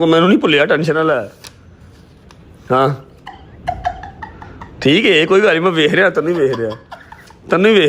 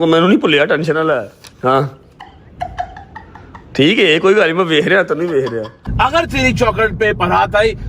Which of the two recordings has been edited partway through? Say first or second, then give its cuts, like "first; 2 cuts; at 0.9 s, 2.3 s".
second; 2 cuts; at 1.4 s, 5.8 s